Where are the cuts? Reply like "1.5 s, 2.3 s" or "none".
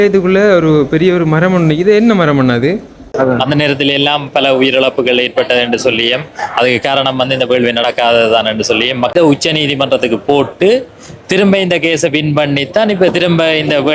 3.1 s, 9.1 s